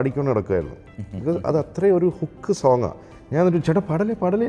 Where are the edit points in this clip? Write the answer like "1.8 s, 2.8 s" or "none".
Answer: none